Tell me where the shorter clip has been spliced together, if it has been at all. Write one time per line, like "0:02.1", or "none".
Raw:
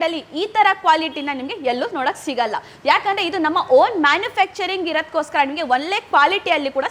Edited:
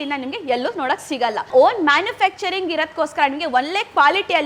0:01.5